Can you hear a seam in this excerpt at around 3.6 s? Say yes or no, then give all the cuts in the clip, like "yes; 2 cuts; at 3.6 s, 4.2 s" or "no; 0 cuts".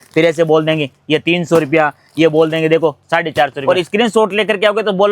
yes; 1 cut; at 3.6 s